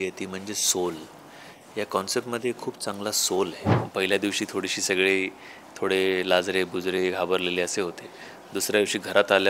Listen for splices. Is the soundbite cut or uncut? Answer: cut